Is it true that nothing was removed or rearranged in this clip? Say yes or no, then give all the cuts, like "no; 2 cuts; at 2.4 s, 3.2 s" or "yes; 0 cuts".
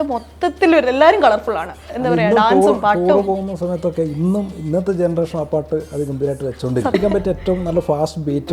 no; 2 cuts; at 2.0 s, 6.9 s